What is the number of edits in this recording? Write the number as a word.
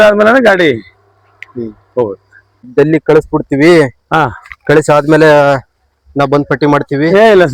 one